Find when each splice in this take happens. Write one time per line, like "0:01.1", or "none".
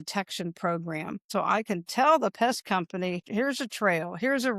0:01.3
0:03.2